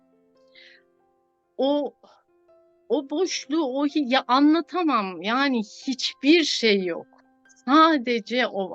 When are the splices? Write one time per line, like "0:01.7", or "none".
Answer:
none